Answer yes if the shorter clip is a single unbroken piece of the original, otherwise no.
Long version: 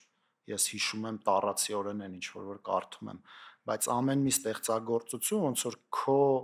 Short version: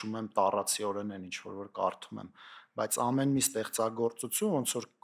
yes